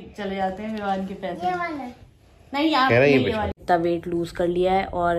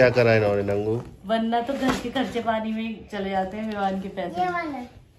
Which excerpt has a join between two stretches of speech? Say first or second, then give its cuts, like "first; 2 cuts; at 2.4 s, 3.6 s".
first; 1 cut; at 3.6 s